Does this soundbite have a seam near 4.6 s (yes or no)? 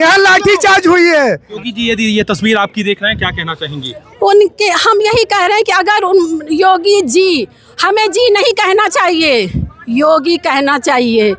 no